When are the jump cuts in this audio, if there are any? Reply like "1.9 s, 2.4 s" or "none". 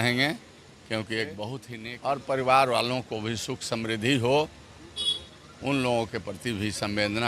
1.7 s

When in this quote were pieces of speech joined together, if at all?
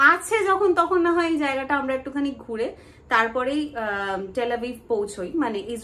none

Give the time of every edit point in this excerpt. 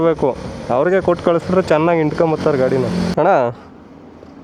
3.1 s

